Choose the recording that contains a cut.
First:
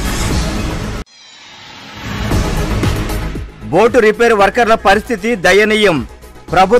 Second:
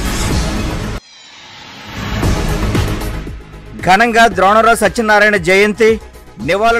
first; 1 cut; at 0.9 s

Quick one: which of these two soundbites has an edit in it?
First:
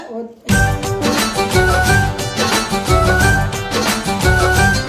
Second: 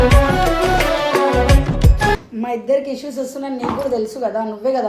second; 1 cut; at 2.3 s

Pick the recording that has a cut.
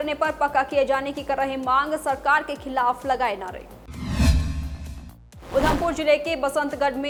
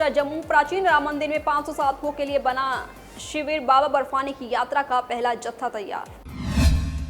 second; 1 cut; at 6.2 s

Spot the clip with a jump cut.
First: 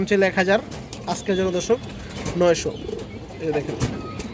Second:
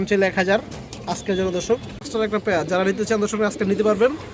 second; 1 cut; at 2.1 s

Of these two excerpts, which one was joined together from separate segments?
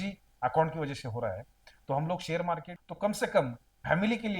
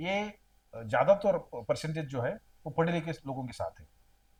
first; 1 cut; at 2.8 s

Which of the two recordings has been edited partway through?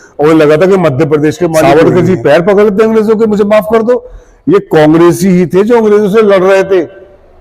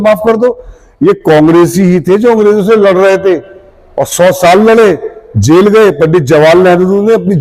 first; 1 cut; at 1.6 s

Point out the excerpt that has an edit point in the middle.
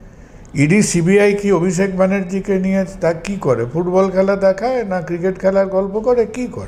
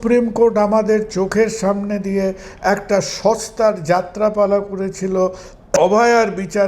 second; 1 cut; at 5.8 s

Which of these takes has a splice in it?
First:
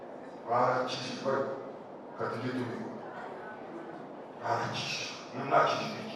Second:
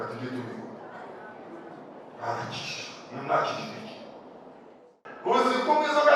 second; 1 cut; at 4.9 s

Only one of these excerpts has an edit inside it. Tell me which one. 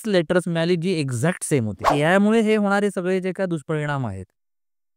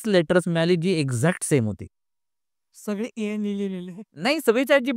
first; 1 cut; at 1.8 s

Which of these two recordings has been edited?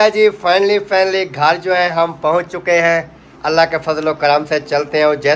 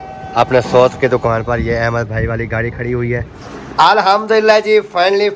second; 1 cut; at 3.3 s

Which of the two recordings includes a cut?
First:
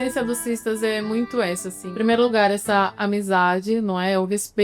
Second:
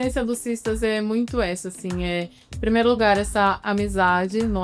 first; 1 cut; at 1.8 s

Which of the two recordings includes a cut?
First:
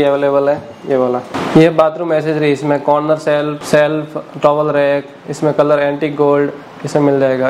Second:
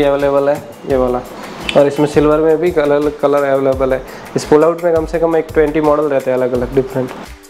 first; 2 cuts; at 1.4 s, 3.6 s

